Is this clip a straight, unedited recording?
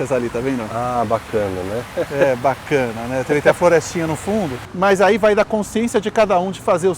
no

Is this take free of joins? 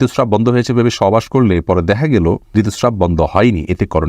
no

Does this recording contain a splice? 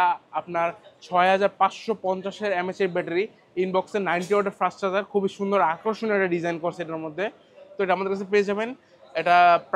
no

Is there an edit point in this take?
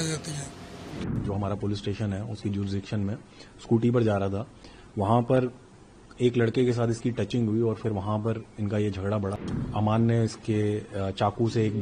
yes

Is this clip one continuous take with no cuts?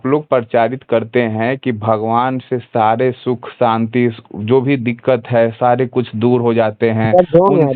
yes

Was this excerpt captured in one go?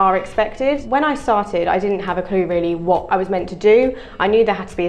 no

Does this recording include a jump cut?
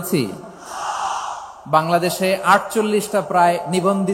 no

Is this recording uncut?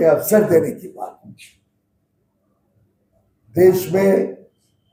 yes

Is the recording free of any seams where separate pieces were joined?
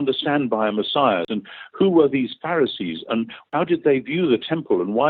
no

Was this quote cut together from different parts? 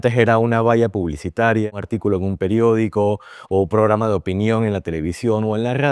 yes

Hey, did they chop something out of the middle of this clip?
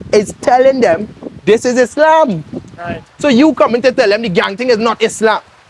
no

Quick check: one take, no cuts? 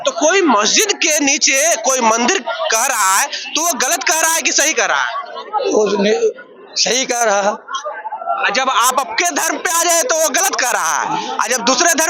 yes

